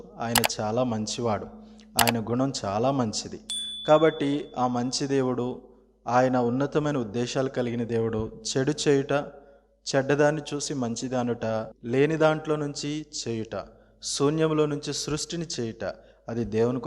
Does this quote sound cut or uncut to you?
cut